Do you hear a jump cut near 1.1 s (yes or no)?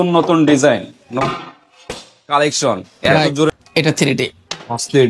no